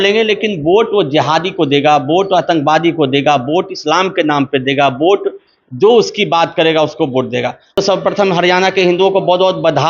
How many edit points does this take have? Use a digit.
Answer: 1